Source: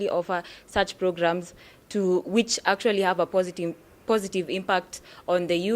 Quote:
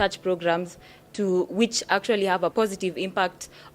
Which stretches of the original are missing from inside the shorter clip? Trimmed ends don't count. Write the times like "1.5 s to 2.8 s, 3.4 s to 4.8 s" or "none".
3.3 s to 4.0 s

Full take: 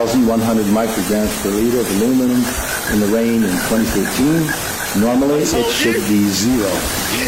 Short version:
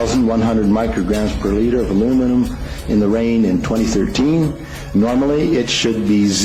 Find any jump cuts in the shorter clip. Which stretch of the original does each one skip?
none

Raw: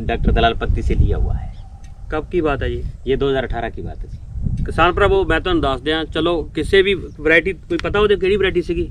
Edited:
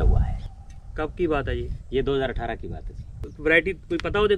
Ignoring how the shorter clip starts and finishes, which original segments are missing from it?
4.4 s to 7.1 s

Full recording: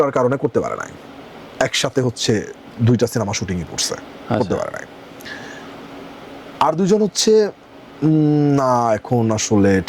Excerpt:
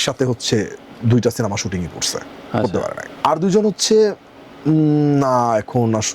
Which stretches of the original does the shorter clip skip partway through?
4.8 s to 6.4 s

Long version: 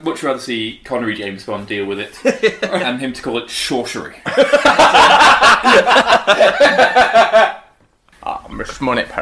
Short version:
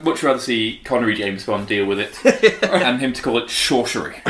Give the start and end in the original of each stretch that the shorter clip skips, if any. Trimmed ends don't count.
none

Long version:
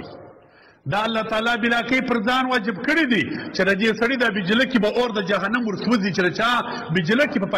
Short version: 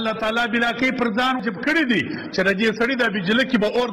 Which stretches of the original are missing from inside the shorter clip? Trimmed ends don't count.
2.5 s to 2.6 s

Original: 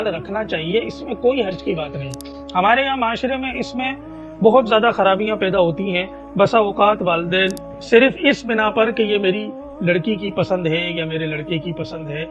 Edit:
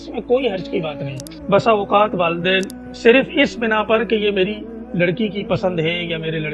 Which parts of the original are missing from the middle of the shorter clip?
2.2 s to 6.2 s

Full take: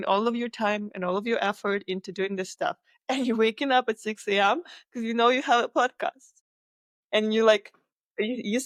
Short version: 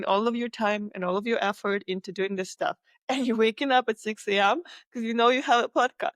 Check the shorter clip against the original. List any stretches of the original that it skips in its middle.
none

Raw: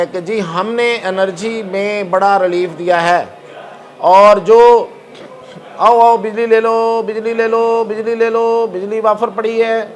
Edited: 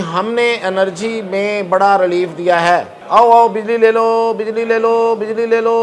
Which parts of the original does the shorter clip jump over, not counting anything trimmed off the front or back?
3.3 s to 5.6 s

